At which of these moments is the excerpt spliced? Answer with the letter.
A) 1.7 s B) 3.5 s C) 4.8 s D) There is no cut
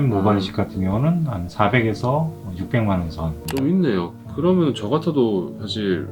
B